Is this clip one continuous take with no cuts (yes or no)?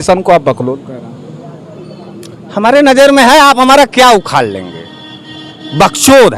yes